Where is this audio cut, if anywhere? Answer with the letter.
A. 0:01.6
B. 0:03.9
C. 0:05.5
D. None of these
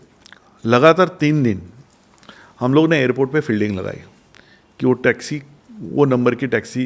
D